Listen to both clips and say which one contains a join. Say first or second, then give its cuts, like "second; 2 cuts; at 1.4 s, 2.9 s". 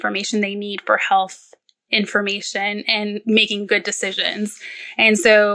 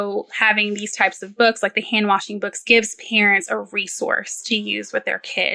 first; 1 cut; at 3.2 s